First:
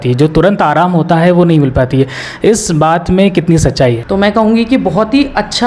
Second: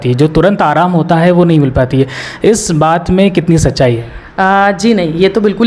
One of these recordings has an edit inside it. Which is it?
first; 1 cut; at 4.0 s

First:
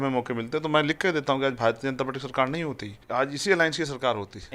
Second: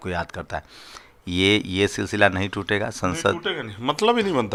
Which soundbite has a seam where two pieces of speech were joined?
first; 1 cut; at 3.0 s

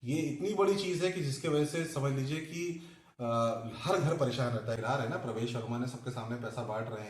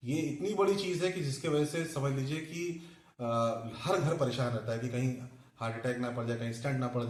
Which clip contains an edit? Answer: first; 1 cut; at 4.8 s

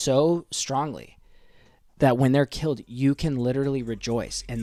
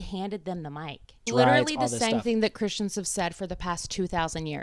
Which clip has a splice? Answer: second; 1 cut; at 1.2 s

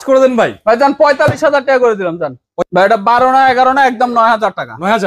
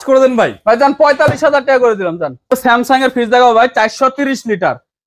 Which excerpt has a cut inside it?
first; 1 cut; at 2.4 s

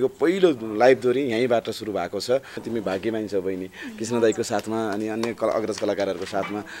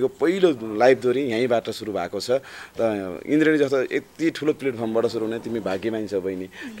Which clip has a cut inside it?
first; 1 cut; at 2.6 s

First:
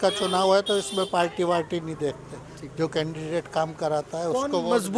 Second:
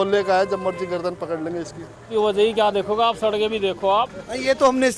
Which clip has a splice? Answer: second; 1 cut; at 2.1 s

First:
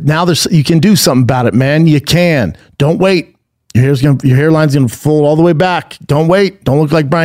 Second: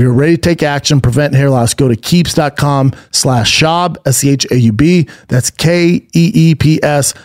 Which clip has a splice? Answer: first; 1 cut; at 2.6 s

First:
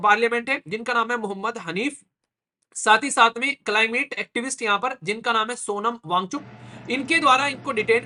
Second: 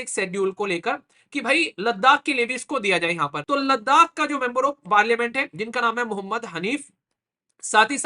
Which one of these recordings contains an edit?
second; 1 cut; at 3.4 s

